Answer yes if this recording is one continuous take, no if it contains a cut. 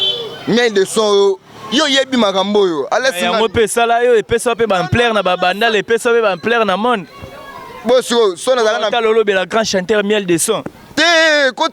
yes